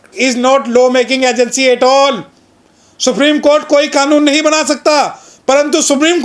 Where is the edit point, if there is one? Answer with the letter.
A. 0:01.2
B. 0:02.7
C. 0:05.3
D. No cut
D